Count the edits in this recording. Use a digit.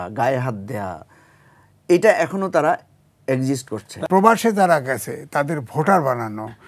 1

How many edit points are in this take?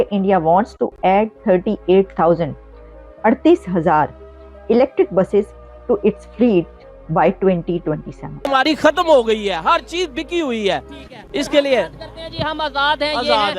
1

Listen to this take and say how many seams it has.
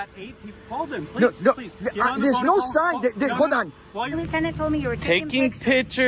1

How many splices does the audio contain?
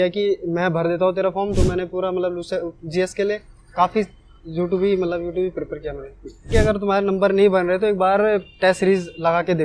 2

